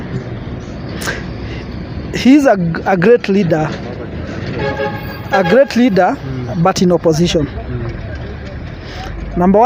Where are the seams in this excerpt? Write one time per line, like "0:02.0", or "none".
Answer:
none